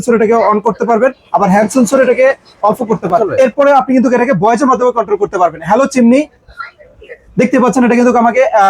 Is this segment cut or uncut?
cut